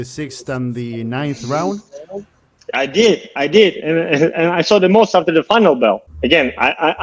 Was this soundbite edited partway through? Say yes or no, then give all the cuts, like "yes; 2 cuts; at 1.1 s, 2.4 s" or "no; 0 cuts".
yes; 1 cut; at 6.1 s